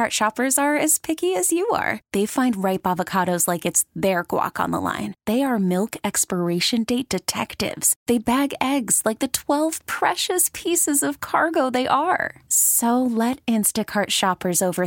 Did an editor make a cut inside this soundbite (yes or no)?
no